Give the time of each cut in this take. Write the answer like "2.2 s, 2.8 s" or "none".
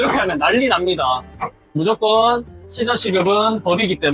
1.8 s